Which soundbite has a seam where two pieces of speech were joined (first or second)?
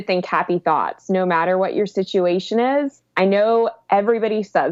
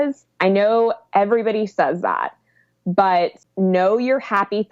second